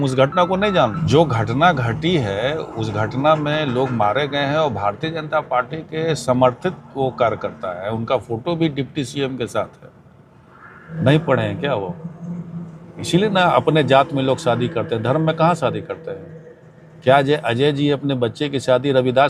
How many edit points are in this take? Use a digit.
2